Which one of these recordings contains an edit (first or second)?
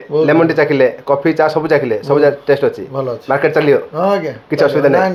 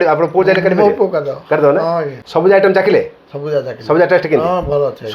second